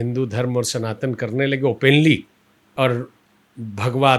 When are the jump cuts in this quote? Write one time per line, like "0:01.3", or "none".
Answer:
0:02.7